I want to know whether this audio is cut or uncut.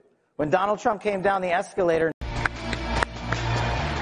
cut